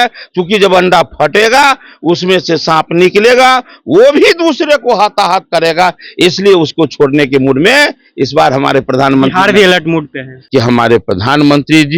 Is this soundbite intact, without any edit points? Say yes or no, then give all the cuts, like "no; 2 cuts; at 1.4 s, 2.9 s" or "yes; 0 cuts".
no; 1 cut; at 10.3 s